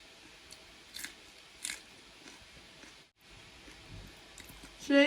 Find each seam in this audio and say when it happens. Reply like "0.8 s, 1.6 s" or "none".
3.2 s